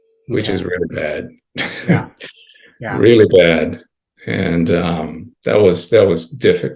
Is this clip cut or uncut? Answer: cut